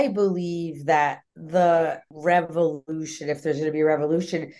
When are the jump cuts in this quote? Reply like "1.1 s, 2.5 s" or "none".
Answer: 1.3 s, 2.1 s